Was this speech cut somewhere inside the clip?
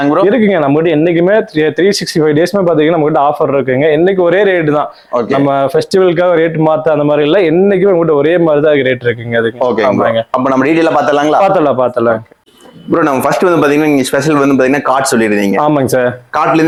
no; 0 cuts

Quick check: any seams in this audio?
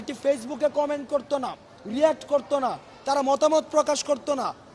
no; 0 cuts

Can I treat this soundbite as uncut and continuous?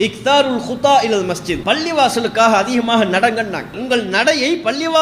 no; 2 cuts; at 1.5 s, 3.8 s

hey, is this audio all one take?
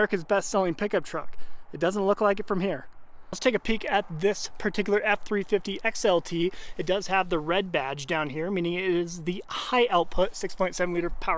yes; 0 cuts

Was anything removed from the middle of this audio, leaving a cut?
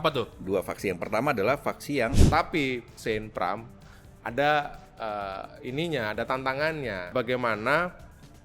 yes; 2 cuts; at 2.2 s, 7.1 s

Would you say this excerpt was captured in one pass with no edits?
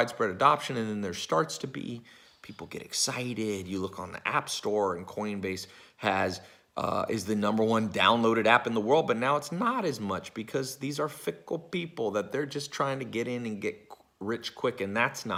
yes; 0 cuts

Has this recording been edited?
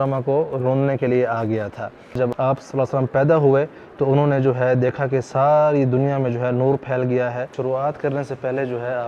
yes; 2 cuts; at 2.2 s, 7.5 s

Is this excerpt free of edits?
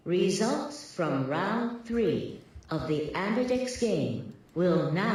yes; 0 cuts

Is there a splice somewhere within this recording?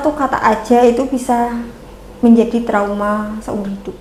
no; 0 cuts

